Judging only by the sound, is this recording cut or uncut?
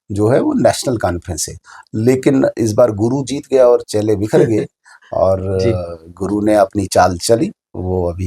uncut